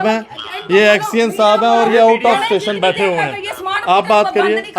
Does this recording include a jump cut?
no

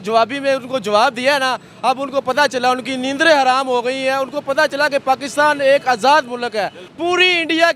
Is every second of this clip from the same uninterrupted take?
no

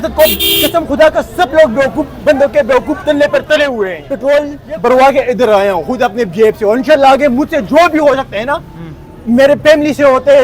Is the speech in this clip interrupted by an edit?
yes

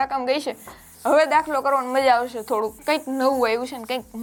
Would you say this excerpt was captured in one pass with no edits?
yes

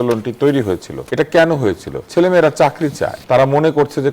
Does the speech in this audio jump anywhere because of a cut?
yes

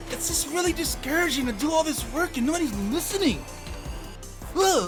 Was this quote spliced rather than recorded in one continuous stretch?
no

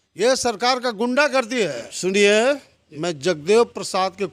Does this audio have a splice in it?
yes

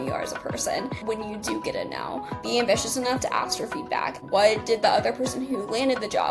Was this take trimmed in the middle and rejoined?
yes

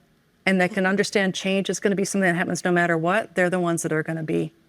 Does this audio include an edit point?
no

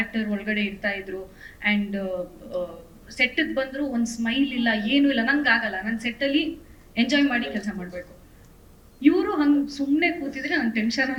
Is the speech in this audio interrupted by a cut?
no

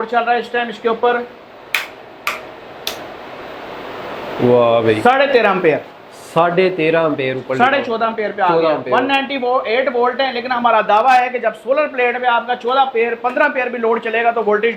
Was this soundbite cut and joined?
no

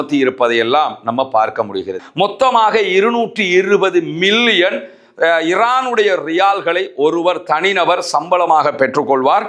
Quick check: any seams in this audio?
yes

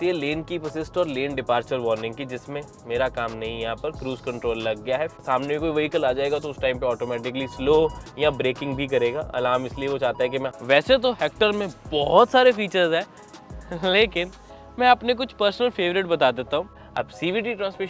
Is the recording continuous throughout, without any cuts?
no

